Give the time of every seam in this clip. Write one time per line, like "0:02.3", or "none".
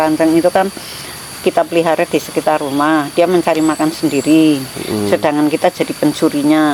none